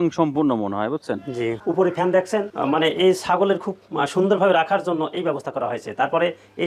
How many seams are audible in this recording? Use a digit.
1